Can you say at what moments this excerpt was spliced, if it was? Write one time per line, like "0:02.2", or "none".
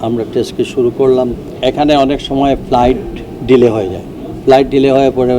0:01.5